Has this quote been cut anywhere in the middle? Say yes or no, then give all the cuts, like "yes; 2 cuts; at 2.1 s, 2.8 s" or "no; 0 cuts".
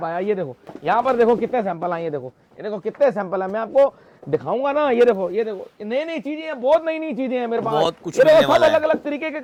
no; 0 cuts